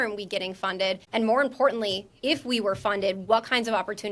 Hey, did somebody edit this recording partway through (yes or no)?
yes